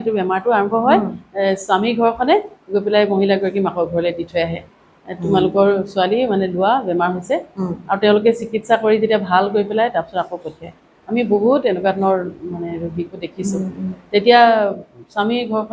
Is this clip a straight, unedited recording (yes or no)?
yes